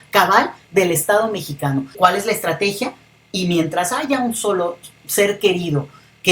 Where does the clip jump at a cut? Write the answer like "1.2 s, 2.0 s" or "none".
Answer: 1.9 s